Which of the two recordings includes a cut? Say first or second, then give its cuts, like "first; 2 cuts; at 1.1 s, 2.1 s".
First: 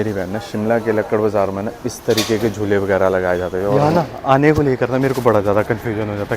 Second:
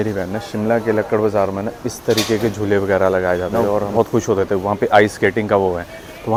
first; 1 cut; at 3.6 s